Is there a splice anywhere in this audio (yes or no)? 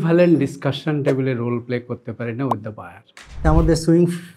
yes